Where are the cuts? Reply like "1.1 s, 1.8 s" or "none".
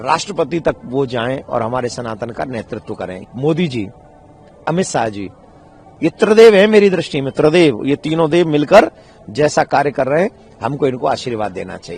3.2 s